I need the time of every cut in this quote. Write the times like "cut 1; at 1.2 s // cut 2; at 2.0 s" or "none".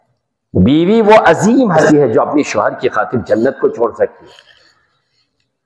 cut 1; at 1.8 s